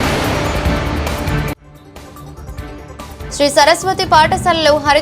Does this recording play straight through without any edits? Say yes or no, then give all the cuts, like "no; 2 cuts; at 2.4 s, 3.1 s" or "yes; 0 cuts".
yes; 0 cuts